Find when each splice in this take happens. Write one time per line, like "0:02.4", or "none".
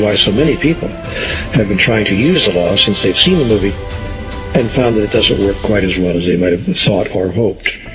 0:02.6